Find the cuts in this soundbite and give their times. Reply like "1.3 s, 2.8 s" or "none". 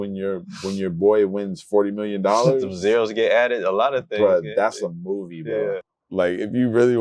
5.9 s